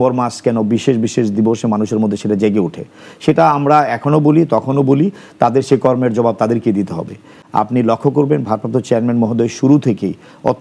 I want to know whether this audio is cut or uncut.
cut